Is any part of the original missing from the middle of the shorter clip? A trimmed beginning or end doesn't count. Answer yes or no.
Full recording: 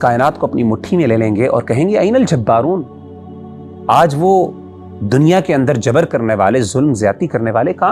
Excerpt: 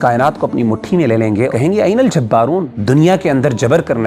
yes